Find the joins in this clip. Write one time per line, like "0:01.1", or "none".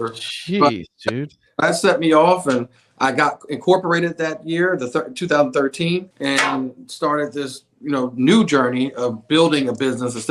0:06.1